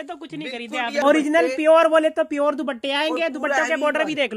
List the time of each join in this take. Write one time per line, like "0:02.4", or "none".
0:01.0